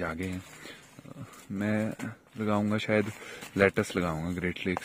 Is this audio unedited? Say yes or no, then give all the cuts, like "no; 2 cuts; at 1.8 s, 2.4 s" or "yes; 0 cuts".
yes; 0 cuts